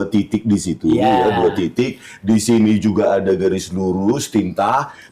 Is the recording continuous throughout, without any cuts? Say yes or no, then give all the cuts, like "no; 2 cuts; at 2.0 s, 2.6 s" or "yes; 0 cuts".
yes; 0 cuts